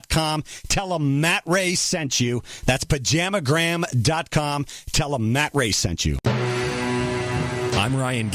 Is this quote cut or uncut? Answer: cut